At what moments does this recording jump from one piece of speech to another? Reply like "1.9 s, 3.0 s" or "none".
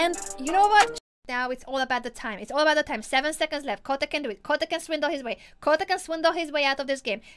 1.2 s